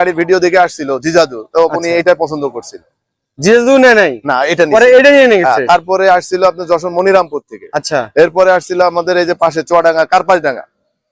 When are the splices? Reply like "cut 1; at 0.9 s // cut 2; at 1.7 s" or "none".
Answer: none